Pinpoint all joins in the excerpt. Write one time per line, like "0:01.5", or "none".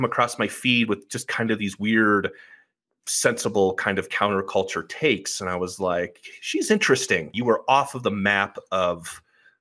0:07.3